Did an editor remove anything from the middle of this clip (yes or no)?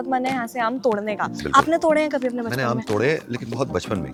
no